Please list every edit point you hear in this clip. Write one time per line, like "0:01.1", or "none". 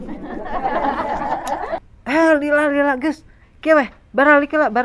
0:01.8